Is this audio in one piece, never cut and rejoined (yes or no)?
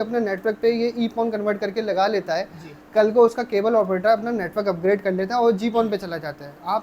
yes